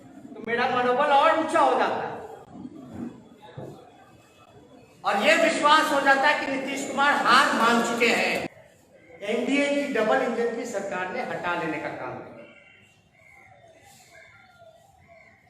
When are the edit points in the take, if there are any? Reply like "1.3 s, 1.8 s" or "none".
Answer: 8.5 s